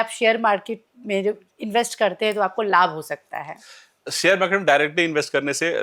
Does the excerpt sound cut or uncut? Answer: uncut